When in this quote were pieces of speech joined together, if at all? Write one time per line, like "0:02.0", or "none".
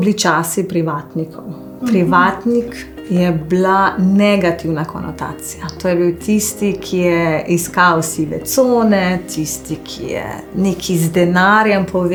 none